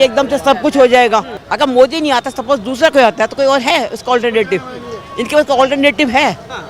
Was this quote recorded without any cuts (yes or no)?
no